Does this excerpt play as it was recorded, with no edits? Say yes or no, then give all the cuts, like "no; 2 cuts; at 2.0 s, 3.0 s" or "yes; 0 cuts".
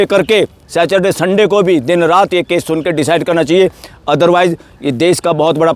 yes; 0 cuts